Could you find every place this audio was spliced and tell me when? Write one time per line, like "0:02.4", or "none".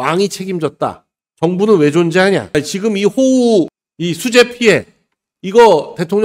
none